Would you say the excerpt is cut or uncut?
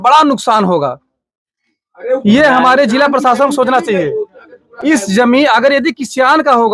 uncut